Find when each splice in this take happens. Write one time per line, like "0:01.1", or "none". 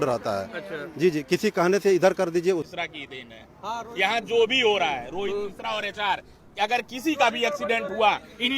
0:02.6